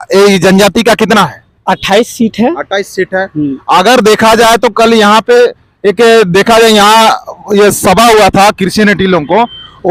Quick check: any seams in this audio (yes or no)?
no